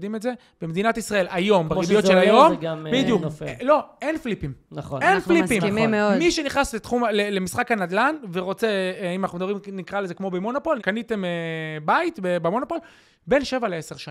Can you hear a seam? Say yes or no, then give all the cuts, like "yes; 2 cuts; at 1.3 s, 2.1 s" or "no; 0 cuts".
yes; 1 cut; at 10.8 s